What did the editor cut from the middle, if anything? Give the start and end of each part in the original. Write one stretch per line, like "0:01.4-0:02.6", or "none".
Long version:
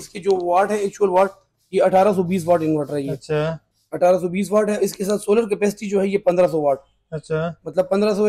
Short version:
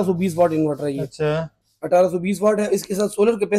none